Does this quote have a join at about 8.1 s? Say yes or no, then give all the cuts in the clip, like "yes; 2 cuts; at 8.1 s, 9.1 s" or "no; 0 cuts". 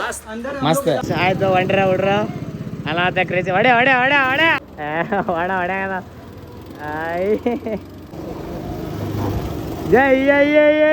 yes; 3 cuts; at 1.0 s, 4.7 s, 8.1 s